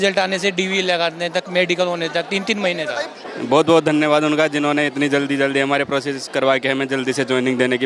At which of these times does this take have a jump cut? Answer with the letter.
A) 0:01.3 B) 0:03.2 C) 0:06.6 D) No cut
B